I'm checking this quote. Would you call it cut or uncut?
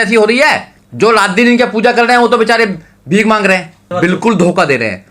cut